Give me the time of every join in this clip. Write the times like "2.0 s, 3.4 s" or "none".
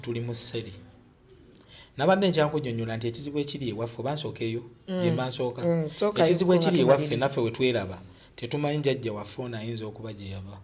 none